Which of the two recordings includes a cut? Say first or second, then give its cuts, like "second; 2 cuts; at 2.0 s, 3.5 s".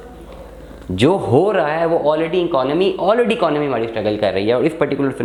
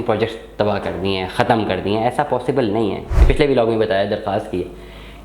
second; 1 cut; at 3.3 s